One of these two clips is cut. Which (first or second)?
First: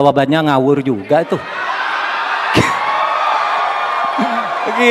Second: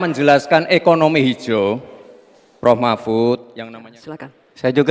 second